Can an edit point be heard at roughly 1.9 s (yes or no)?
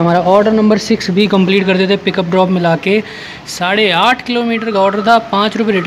no